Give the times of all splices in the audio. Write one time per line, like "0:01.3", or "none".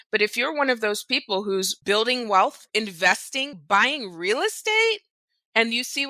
0:01.7
0:02.6